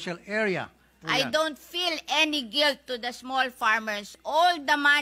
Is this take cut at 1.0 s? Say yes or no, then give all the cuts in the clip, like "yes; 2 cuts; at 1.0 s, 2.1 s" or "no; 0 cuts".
yes; 1 cut; at 1.0 s